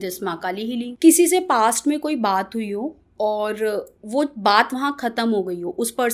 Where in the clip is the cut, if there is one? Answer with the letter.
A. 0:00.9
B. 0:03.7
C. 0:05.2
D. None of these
A